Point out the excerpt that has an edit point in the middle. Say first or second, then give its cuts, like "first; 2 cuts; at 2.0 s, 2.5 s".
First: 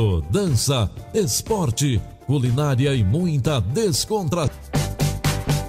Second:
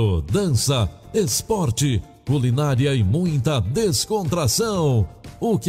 first; 1 cut; at 4.5 s